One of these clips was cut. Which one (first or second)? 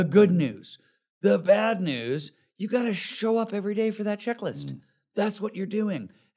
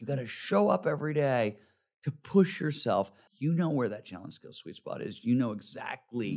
second